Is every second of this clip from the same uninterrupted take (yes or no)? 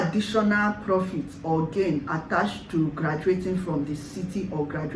yes